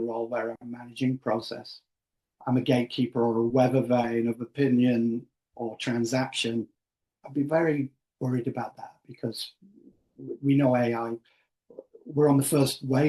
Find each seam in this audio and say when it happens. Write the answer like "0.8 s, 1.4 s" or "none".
none

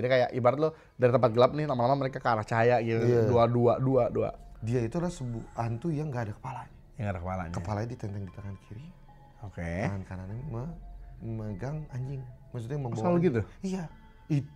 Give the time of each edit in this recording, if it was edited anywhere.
4.5 s

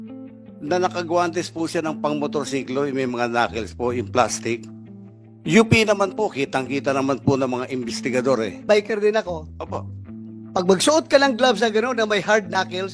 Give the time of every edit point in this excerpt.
8.6 s

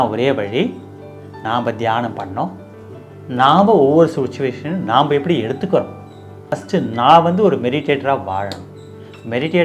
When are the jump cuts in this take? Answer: 6.5 s

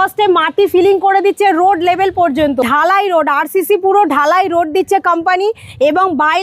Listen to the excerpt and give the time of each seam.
2.7 s

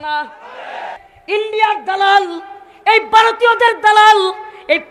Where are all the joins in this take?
1.0 s

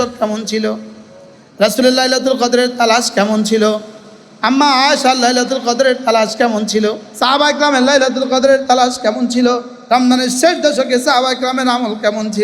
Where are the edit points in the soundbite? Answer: 7.1 s, 9.7 s

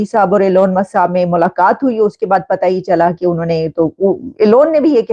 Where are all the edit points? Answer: none

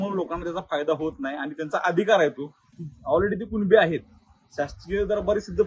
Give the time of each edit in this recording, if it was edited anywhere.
none

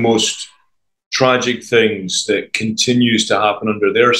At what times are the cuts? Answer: none

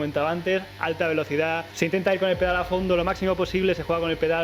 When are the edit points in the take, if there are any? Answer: 1.7 s

